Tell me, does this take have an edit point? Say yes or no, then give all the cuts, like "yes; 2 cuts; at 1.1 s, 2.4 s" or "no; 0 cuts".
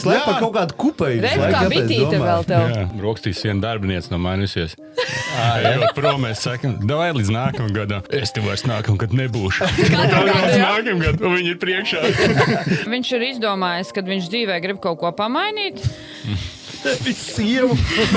yes; 3 cuts; at 2.9 s, 8.0 s, 12.9 s